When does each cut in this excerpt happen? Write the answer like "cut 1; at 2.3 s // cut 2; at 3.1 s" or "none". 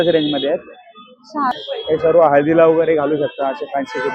cut 1; at 1.5 s